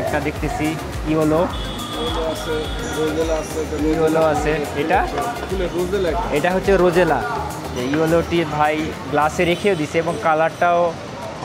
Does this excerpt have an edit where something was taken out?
yes; 1 cut; at 7.7 s

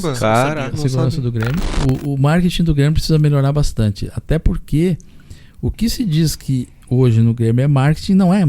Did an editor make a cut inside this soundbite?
yes; 1 cut; at 1.8 s

